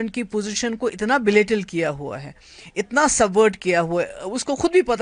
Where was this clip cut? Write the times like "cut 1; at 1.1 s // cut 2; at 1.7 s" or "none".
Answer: none